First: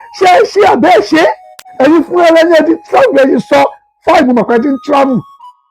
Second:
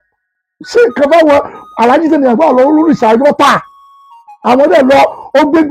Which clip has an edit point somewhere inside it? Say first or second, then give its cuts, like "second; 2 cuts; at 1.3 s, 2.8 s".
first; 1 cut; at 1.6 s